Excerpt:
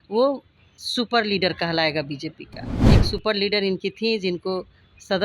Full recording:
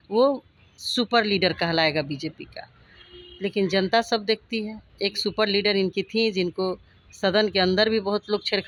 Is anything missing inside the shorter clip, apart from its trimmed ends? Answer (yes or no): yes